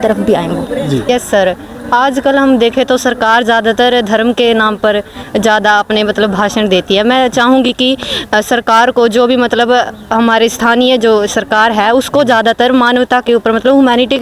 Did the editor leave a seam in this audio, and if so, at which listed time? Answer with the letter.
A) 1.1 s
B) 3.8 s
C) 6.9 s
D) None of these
A